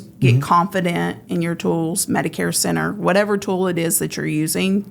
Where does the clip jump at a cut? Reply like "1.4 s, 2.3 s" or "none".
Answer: none